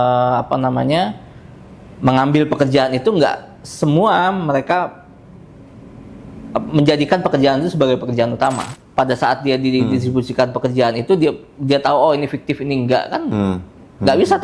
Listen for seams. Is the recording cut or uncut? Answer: cut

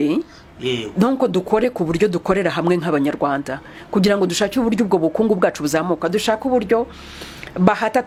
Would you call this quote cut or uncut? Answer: uncut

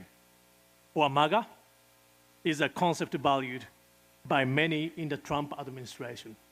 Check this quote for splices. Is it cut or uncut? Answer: uncut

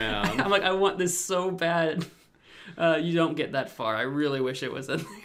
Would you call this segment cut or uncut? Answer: uncut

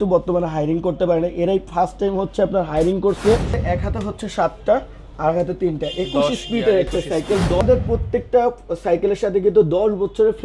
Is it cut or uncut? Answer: cut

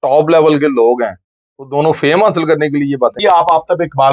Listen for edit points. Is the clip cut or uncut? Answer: cut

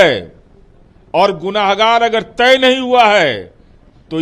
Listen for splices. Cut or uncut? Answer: uncut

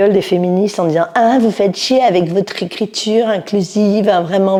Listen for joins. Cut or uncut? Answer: uncut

